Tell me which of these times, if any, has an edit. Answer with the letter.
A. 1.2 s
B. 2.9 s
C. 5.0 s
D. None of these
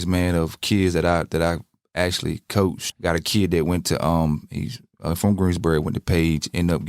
B